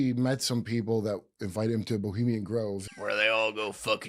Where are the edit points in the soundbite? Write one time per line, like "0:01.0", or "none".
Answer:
0:02.8